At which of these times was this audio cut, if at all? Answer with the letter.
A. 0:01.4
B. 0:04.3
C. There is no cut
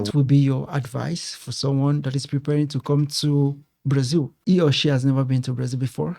B